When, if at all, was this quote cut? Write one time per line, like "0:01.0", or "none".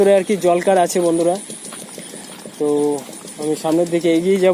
none